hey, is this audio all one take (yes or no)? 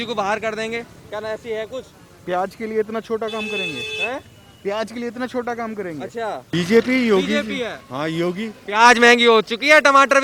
no